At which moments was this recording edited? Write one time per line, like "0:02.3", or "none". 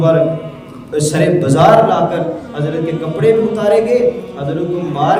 none